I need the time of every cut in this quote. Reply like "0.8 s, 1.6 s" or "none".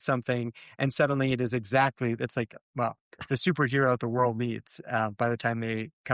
none